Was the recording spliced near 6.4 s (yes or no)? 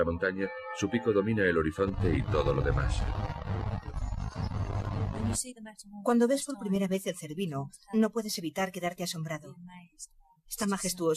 yes